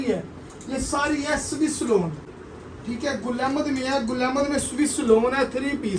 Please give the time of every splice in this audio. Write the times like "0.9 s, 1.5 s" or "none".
none